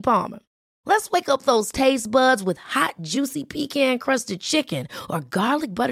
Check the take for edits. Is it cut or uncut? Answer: uncut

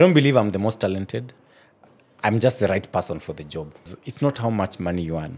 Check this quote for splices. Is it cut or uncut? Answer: cut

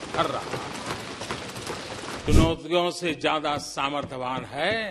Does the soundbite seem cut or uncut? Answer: cut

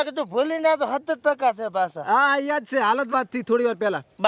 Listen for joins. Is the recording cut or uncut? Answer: uncut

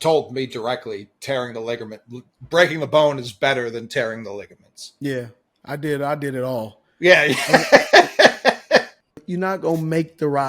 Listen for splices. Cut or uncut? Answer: cut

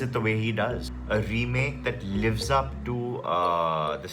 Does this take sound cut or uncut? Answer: cut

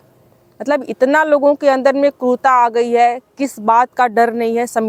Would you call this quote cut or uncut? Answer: uncut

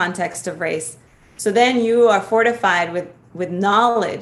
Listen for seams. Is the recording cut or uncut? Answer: uncut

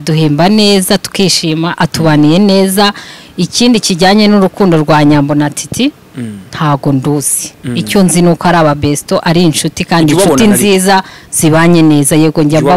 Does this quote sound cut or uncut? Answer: uncut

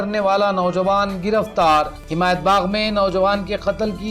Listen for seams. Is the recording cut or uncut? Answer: uncut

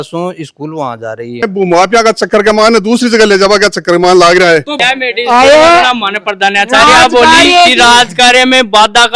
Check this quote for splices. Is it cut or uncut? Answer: cut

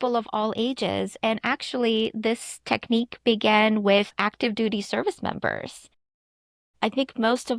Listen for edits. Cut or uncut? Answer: cut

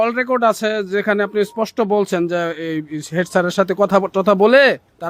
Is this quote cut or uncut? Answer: uncut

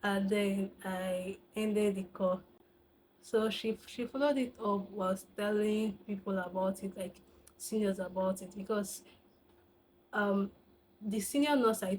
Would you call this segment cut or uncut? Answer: uncut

